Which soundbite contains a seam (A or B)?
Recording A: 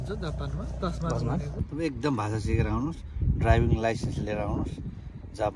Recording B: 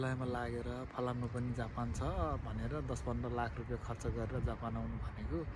A